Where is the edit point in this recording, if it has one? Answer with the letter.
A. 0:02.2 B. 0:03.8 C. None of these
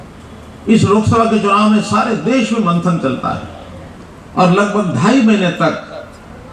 C